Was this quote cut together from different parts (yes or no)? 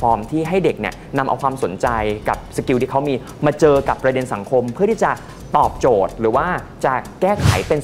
no